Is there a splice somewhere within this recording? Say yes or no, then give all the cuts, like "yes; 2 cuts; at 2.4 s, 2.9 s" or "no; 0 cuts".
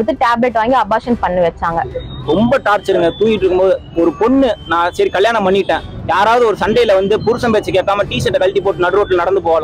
yes; 1 cut; at 1.9 s